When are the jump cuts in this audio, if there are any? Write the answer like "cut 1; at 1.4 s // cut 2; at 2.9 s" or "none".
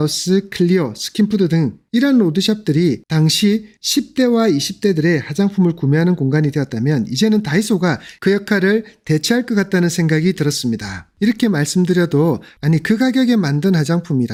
none